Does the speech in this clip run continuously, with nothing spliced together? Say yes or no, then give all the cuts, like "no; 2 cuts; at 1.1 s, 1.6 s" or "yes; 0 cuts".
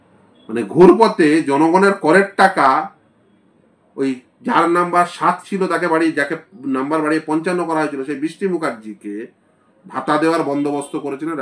yes; 0 cuts